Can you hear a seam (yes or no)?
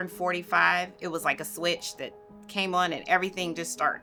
no